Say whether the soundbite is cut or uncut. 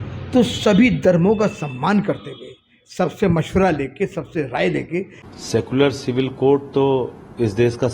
cut